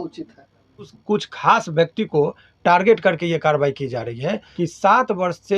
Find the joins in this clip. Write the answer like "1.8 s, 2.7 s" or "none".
0.9 s, 4.5 s